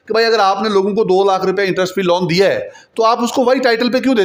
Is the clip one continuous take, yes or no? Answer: yes